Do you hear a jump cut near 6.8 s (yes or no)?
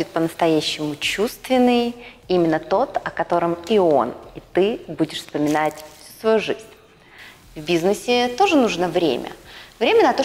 no